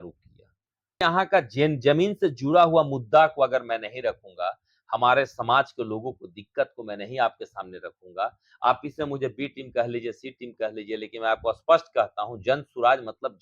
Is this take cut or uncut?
cut